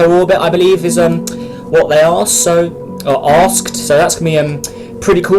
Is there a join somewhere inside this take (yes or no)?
yes